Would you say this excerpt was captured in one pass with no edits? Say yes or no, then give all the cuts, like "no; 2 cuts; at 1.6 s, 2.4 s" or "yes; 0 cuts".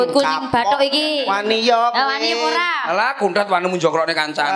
yes; 0 cuts